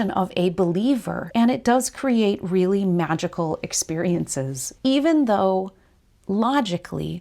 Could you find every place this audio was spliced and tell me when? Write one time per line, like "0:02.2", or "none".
0:01.2
0:04.6